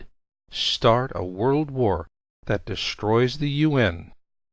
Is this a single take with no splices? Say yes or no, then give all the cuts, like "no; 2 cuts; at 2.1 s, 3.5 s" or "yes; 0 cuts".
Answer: yes; 0 cuts